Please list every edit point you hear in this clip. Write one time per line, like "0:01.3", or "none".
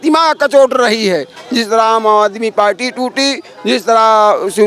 0:01.4